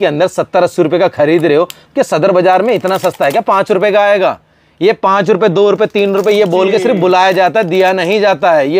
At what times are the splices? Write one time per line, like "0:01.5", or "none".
none